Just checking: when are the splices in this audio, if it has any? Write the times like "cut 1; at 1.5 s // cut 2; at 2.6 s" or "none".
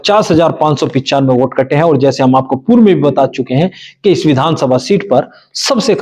none